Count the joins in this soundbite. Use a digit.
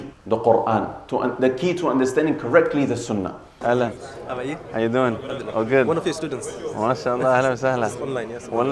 1